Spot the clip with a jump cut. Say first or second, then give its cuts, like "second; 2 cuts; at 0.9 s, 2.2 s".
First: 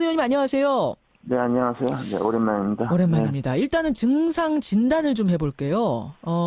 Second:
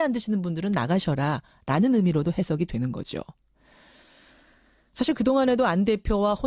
second; 1 cut; at 2.5 s